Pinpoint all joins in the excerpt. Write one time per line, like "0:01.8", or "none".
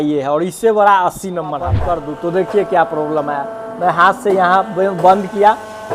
0:01.8